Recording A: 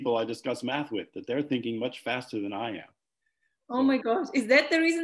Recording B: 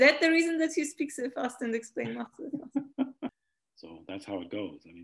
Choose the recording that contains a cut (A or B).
B